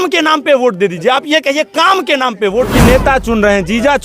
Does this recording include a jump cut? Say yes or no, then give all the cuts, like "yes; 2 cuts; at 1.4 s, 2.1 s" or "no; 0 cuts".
yes; 1 cut; at 2.7 s